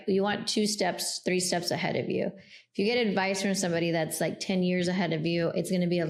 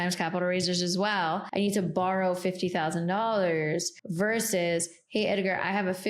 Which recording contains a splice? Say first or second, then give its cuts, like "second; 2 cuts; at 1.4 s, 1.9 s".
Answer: second; 2 cuts; at 1.5 s, 4.0 s